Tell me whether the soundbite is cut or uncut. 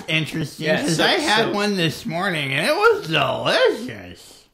uncut